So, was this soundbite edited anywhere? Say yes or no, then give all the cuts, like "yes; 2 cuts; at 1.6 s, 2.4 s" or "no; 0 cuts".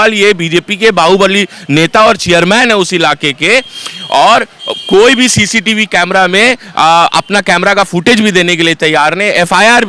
no; 0 cuts